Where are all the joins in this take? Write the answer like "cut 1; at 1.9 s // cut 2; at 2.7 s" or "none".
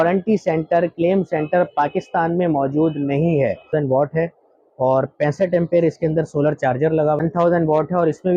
cut 1; at 3.7 s // cut 2; at 7.2 s